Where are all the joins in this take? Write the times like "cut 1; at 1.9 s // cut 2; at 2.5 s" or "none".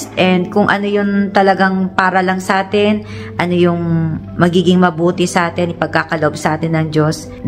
none